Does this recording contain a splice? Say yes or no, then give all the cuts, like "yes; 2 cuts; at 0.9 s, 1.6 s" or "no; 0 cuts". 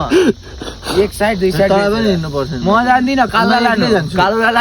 no; 0 cuts